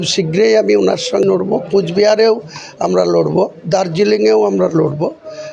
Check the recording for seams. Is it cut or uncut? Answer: cut